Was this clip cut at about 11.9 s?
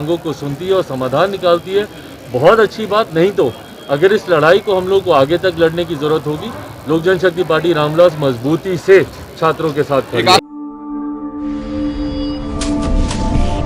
no; 1 cut; at 10.4 s

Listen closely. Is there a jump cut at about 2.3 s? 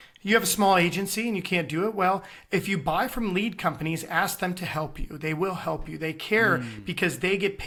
no; 0 cuts

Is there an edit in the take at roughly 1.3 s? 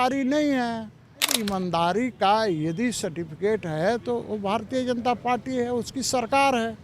yes; 1 cut; at 1.3 s

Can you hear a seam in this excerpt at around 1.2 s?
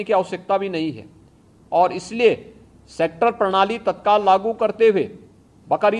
no; 0 cuts

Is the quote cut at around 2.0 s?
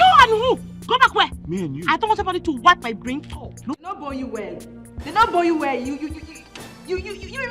no; 1 cut; at 4.0 s

